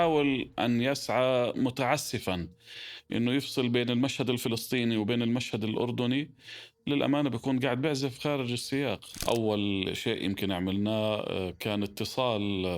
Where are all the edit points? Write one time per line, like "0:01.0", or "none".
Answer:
0:09.2